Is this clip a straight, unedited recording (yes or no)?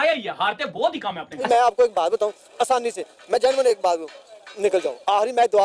no